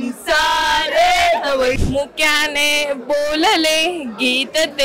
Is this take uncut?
no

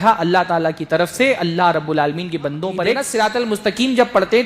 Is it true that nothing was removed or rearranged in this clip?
no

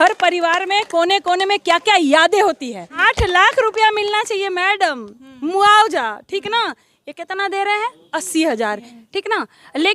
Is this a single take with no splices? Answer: no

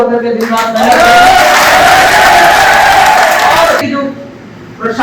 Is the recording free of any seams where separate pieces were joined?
no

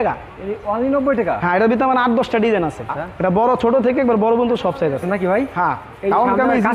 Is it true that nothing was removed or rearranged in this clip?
no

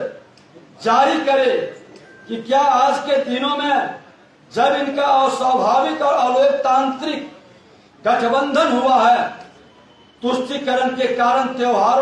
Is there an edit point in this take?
no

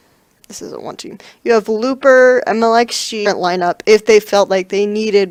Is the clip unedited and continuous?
yes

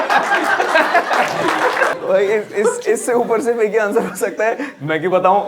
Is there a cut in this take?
yes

